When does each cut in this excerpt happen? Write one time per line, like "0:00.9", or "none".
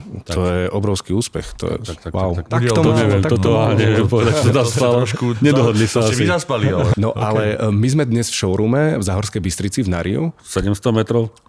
0:02.5
0:06.9
0:10.4